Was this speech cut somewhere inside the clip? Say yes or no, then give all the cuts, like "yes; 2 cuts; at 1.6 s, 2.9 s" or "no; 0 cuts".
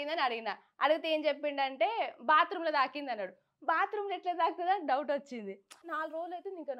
yes; 1 cut; at 5.9 s